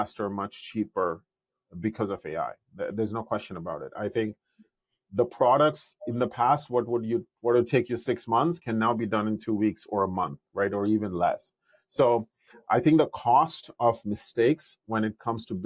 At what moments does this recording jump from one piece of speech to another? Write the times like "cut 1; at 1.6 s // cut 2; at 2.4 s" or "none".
none